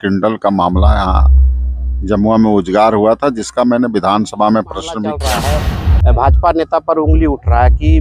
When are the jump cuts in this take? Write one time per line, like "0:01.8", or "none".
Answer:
0:05.1